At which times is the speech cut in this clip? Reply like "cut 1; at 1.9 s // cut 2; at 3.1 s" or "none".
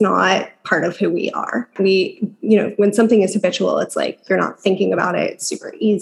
cut 1; at 1.7 s